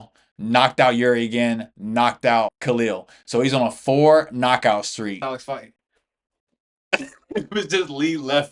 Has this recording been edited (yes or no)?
yes